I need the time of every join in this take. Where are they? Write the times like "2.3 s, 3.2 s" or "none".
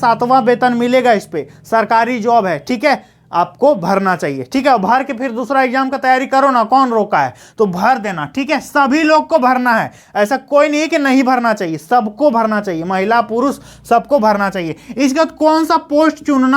none

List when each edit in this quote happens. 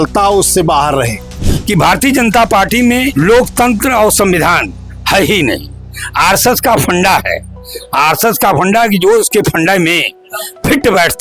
1.5 s, 3.1 s

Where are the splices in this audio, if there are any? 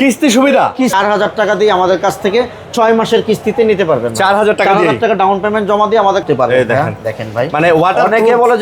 0.9 s, 6.2 s

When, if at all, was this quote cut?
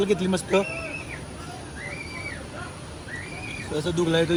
none

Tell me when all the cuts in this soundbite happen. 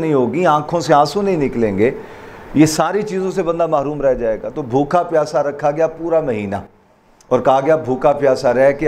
none

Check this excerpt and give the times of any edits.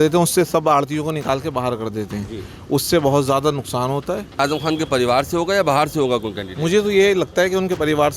4.4 s

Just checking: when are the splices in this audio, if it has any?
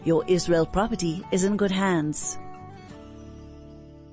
2.2 s

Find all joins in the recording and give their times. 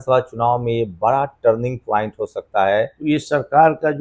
3.0 s

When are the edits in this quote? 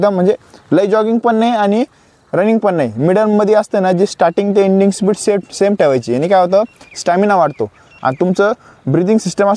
none

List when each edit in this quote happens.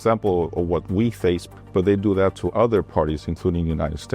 1.5 s, 2.4 s

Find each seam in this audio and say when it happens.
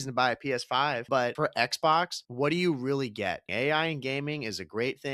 1.2 s, 2.2 s, 3.5 s

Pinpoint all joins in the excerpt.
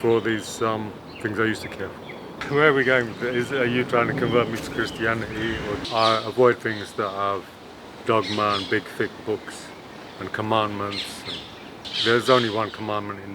2.4 s, 5.8 s, 11.9 s

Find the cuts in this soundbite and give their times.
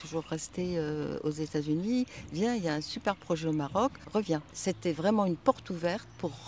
4.2 s

